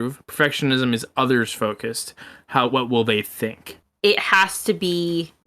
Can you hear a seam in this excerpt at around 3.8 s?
yes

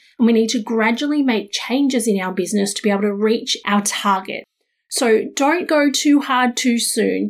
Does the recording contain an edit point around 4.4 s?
yes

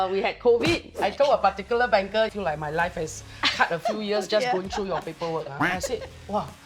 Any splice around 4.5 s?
no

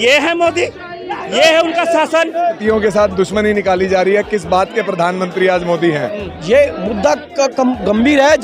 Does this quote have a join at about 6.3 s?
yes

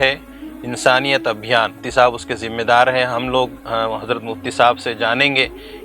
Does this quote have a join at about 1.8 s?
yes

